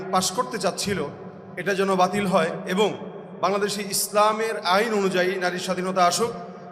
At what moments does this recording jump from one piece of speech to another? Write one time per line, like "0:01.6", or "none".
none